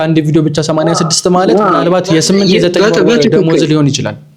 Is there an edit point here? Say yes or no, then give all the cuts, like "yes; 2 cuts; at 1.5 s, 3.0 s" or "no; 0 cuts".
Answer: no; 0 cuts